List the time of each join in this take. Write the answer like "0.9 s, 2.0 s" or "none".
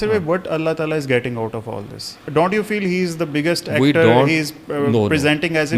2.2 s